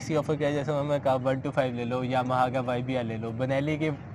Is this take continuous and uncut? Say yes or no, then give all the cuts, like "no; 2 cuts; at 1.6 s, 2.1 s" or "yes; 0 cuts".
yes; 0 cuts